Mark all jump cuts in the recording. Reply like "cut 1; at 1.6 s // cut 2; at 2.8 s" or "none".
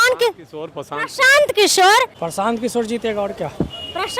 cut 1; at 2.1 s